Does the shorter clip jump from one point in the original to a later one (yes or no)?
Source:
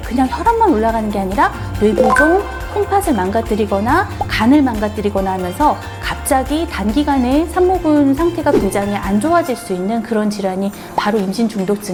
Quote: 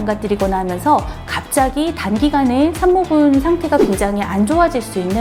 no